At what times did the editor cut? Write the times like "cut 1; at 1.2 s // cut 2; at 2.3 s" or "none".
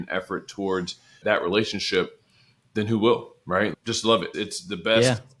cut 1; at 3.8 s